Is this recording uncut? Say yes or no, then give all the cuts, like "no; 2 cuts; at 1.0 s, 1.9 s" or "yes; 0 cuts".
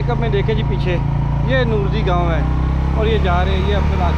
yes; 0 cuts